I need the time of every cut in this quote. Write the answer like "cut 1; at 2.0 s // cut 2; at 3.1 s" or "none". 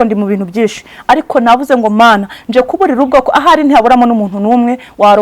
none